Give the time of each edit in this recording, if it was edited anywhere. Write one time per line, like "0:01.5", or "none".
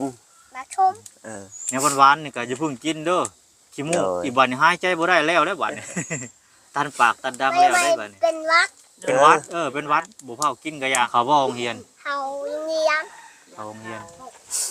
0:11.1